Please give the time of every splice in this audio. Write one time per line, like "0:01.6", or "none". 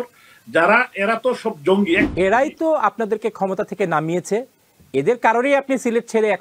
0:02.0